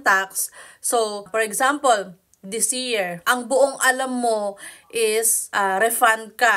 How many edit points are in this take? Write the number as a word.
three